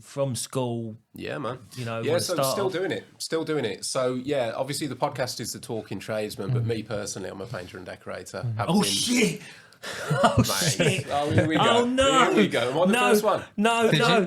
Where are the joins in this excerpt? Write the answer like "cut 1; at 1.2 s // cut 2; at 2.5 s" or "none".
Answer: none